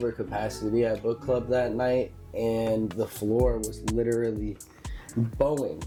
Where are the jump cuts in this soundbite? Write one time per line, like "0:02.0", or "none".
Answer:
none